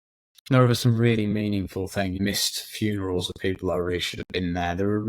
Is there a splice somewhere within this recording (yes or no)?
yes